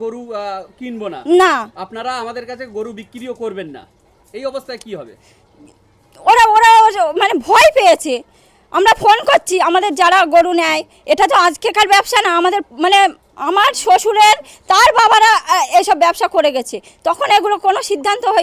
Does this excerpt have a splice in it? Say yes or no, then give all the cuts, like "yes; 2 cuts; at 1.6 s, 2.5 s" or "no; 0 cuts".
no; 0 cuts